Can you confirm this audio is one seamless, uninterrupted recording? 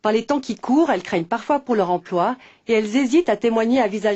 no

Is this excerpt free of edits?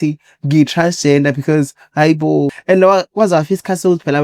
no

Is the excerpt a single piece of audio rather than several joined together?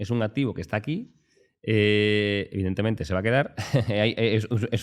yes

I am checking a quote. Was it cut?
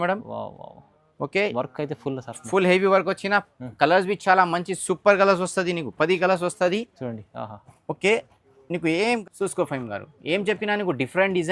yes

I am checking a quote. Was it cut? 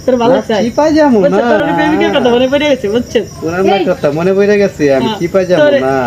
yes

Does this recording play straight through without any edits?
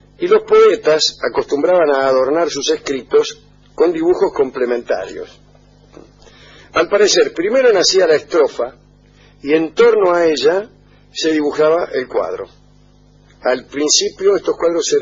yes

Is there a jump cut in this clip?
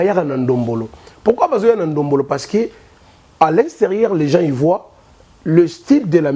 no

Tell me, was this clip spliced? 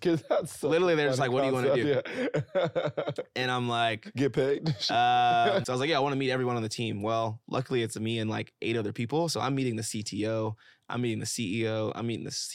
yes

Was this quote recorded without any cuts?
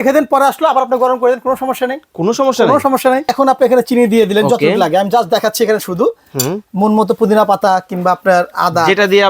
no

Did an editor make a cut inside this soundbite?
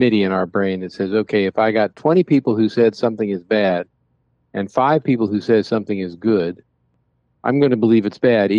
no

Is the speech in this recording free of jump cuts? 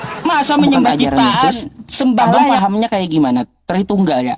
no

